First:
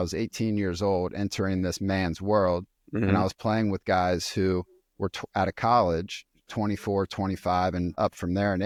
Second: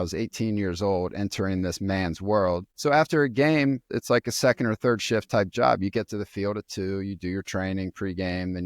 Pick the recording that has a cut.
second; 2 cuts; at 2.7 s, 3.9 s

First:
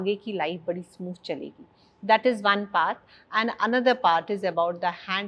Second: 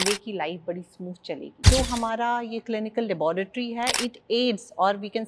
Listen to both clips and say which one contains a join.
second; 1 cut; at 1.6 s

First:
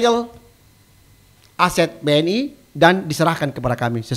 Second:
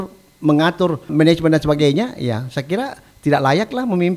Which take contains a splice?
second; 1 cut; at 1.1 s

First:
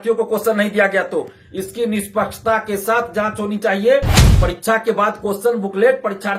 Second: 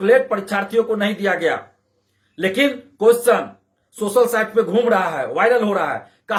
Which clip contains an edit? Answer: first; 1 cut; at 4.2 s

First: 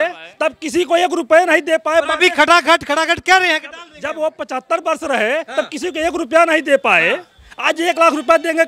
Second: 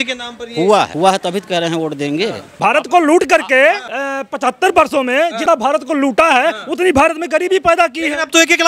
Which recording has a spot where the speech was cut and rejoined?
second; 4 cuts; at 0.9 s, 2.5 s, 3.9 s, 5.4 s

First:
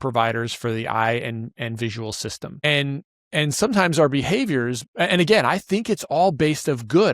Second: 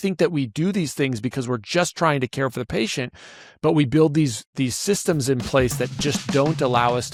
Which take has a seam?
first; 1 cut; at 2.6 s

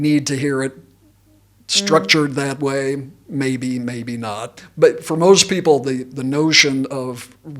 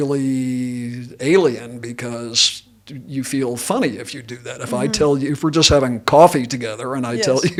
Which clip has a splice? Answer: first; 1 cut; at 4.6 s

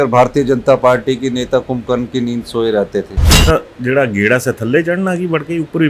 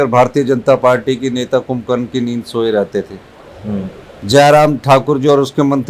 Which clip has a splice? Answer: first; 1 cut; at 3.2 s

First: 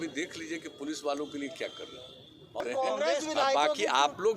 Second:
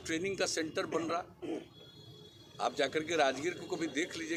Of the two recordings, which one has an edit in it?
first; 1 cut; at 2.6 s

